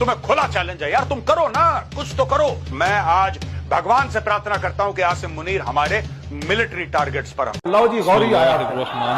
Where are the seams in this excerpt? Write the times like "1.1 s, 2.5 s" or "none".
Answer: none